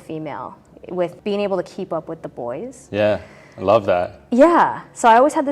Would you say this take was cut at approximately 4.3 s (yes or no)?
no